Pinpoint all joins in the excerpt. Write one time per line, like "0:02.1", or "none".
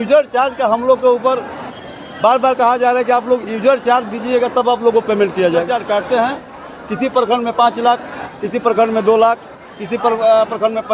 0:05.7

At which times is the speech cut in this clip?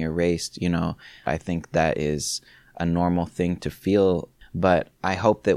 0:01.3
0:04.3

